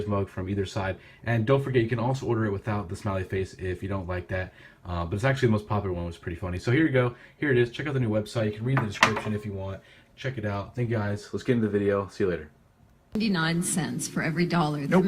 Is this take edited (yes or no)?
yes